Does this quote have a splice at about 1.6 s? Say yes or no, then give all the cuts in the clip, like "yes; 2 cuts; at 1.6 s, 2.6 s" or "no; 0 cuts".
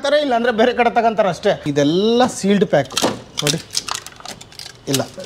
yes; 1 cut; at 1.6 s